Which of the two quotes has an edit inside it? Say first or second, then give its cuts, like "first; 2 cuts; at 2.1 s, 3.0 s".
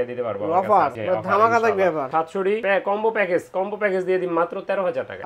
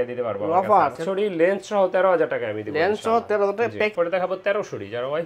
second; 2 cuts; at 1.0 s, 3.9 s